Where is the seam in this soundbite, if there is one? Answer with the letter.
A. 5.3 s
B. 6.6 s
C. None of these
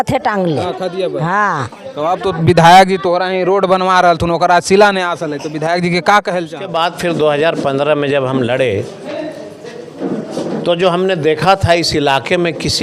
B